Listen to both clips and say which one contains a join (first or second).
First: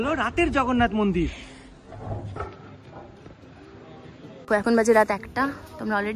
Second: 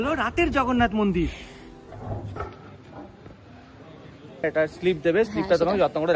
second